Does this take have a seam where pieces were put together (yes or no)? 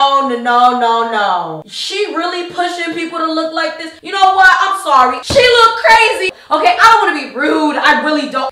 yes